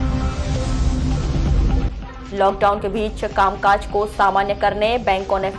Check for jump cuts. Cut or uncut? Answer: uncut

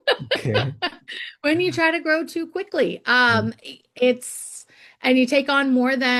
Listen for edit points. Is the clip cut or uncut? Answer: uncut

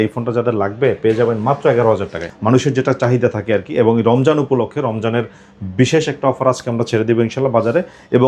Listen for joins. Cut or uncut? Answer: cut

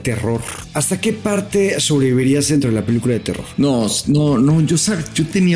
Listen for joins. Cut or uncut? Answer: cut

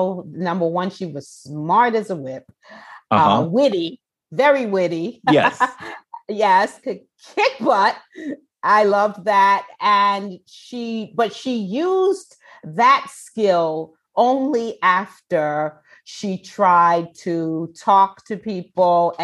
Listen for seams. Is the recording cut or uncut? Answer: cut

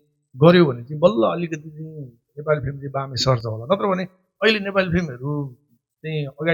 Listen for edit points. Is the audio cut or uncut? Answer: uncut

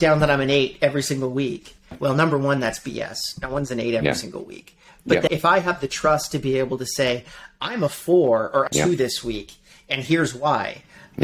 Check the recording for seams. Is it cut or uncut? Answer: cut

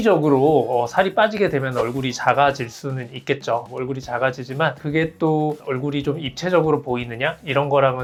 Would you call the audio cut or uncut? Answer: uncut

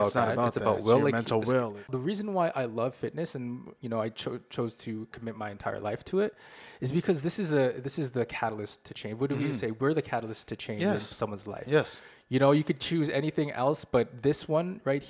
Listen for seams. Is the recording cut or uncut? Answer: cut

